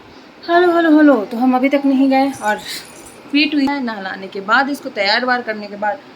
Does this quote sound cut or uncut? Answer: cut